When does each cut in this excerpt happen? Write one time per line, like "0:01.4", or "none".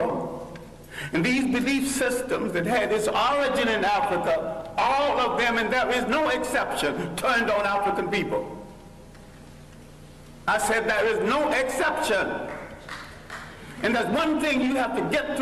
0:14.1